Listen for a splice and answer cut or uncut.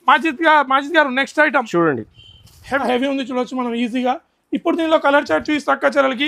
cut